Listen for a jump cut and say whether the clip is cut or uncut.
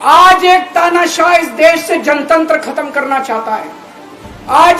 uncut